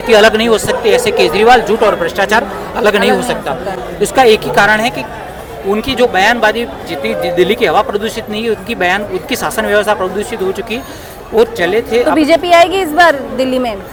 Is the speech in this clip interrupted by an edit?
no; 0 cuts

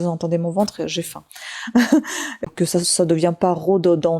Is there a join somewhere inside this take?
yes; 1 cut; at 2.3 s

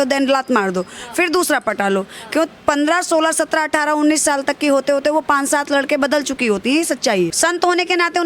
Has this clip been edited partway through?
yes; 1 cut; at 7.3 s

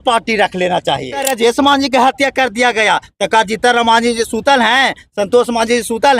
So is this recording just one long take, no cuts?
no; 1 cut; at 1.3 s

